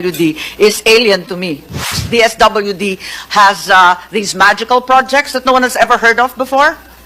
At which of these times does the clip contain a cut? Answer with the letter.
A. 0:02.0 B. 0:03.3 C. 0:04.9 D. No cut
A